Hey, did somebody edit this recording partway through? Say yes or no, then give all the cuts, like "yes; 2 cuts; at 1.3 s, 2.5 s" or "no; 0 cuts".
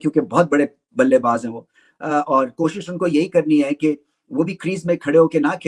no; 0 cuts